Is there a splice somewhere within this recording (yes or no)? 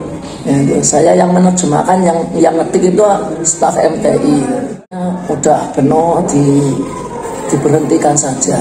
yes